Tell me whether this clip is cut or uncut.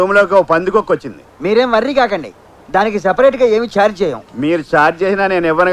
uncut